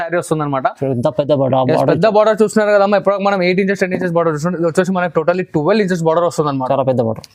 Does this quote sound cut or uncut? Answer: uncut